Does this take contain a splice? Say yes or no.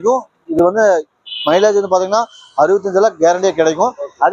no